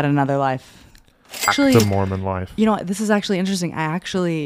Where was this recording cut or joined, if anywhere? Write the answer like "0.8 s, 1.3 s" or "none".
1.5 s